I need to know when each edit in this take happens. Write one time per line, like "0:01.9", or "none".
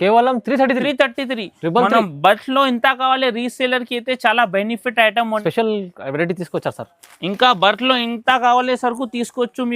0:05.4